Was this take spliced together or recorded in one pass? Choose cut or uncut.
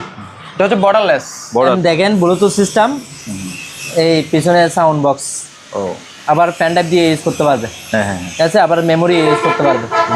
cut